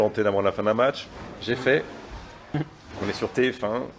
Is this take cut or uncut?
cut